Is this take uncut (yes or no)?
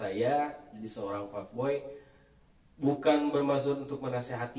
yes